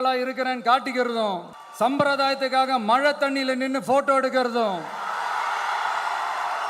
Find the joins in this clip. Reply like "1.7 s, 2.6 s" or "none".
1.6 s